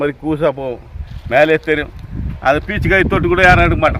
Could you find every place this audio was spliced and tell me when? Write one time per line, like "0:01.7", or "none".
none